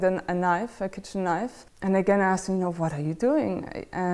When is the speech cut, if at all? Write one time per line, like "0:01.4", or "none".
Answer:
0:01.6